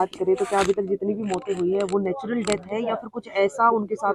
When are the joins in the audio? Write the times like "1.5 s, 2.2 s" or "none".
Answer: none